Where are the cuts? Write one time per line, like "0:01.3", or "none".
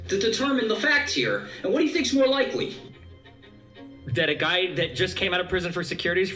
none